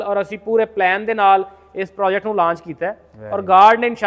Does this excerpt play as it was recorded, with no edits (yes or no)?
yes